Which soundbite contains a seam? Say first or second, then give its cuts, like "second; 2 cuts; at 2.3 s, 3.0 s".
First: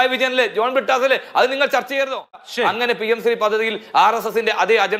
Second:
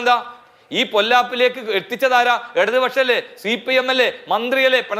first; 1 cut; at 2.4 s